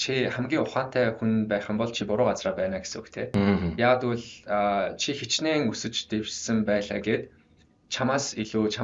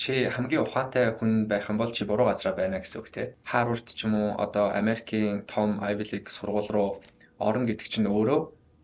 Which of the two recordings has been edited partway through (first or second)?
second